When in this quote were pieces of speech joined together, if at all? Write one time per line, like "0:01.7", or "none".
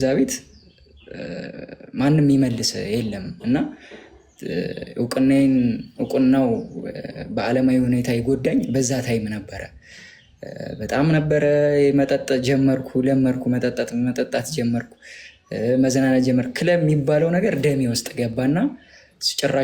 none